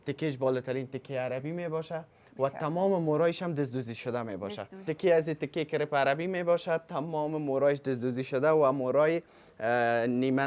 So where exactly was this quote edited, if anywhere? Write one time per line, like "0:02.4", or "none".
0:04.8

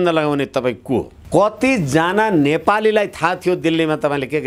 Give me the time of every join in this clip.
0:01.2

